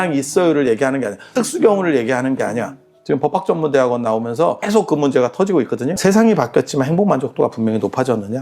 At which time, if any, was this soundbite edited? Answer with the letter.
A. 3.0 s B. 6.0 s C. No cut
B